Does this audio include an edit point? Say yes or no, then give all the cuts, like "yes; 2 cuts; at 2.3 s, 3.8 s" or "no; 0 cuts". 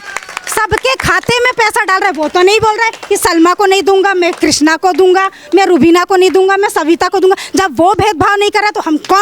no; 0 cuts